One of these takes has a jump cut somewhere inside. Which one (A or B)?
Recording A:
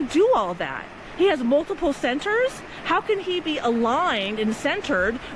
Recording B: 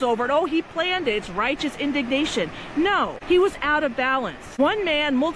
B